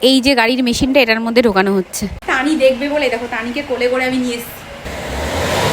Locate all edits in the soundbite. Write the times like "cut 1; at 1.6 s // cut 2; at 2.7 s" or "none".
cut 1; at 2.2 s // cut 2; at 4.8 s